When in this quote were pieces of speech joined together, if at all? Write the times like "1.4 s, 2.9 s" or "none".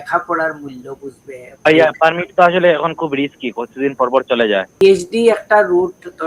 1.6 s, 4.8 s

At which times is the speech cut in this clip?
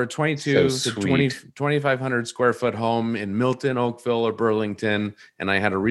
none

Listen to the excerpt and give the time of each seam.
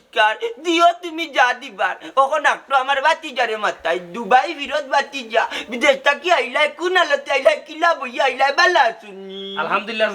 none

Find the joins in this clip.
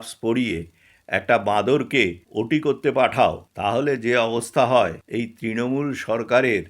2.2 s, 3.5 s, 5.0 s

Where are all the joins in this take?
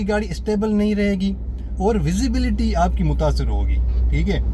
none

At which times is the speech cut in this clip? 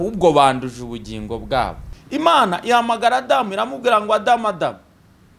1.9 s

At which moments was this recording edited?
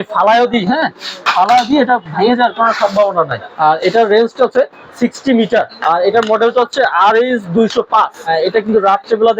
3.4 s, 5.7 s, 8.3 s

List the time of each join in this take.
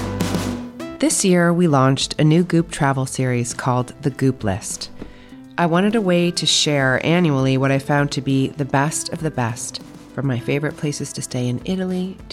0.9 s

